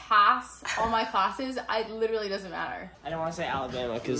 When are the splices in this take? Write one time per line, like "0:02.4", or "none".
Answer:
0:02.9